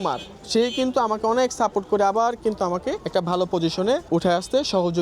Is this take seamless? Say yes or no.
no